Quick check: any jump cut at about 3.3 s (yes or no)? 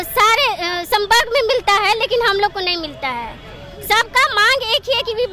no